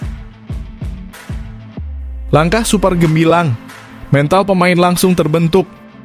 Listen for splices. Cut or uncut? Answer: cut